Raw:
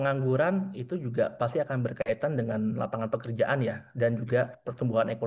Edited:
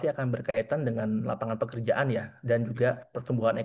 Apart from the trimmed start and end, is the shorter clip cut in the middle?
no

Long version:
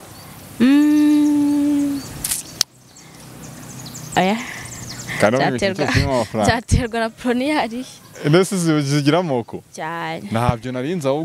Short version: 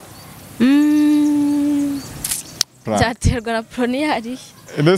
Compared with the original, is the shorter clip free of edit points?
no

